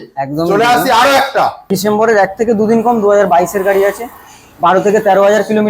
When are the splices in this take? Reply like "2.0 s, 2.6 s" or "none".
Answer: 1.7 s